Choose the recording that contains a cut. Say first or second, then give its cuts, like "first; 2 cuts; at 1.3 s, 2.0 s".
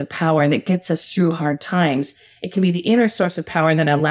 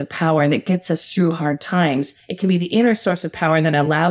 second; 1 cut; at 2.2 s